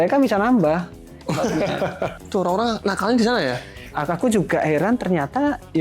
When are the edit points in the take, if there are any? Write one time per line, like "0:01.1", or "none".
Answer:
0:02.1
0:03.9